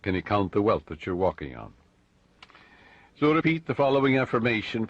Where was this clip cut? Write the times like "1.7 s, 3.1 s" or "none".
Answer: 1.0 s